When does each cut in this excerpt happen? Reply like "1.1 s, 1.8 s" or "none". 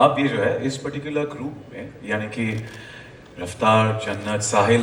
none